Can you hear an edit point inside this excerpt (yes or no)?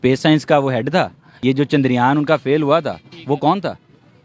yes